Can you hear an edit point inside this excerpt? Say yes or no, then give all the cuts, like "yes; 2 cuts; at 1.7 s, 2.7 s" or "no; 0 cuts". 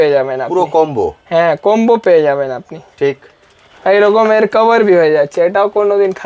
no; 0 cuts